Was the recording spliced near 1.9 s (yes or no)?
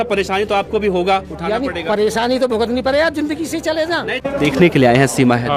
no